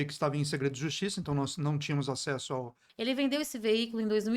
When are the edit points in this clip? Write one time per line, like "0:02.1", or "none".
0:02.8

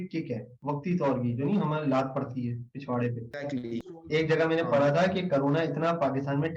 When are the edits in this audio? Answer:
0:02.7
0:03.8

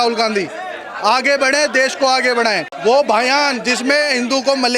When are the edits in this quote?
0:02.7

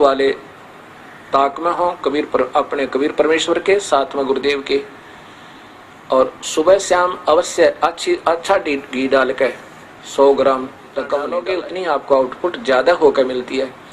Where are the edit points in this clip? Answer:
0:11.4

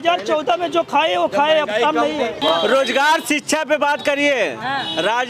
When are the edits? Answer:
0:02.4

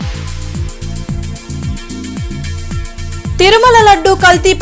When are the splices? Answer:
none

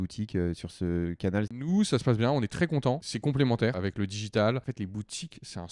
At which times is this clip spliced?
0:01.6
0:03.1
0:03.8
0:04.7

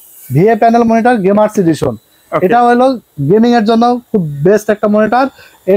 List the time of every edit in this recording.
none

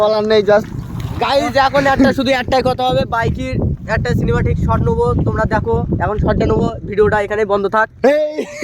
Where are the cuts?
0:03.1

